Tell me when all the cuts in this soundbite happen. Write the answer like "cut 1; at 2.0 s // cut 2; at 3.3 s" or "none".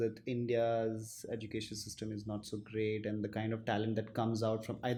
none